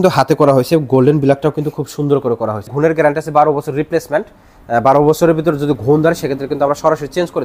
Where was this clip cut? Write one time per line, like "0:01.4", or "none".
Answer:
0:02.7